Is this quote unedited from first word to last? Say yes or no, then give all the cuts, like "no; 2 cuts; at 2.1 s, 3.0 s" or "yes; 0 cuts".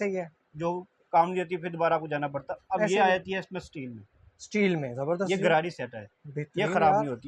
yes; 0 cuts